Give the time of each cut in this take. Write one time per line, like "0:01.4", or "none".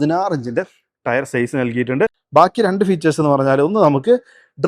0:02.2